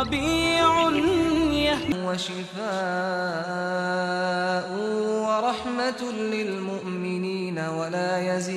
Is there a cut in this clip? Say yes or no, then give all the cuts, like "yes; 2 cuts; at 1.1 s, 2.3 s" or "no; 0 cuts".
yes; 1 cut; at 1.9 s